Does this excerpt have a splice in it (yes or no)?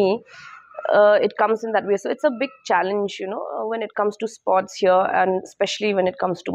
no